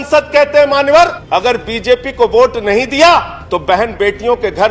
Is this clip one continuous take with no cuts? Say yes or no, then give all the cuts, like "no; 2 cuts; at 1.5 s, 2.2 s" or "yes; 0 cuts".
no; 2 cuts; at 1.2 s, 3.4 s